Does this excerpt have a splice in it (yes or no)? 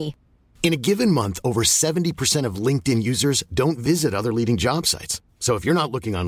no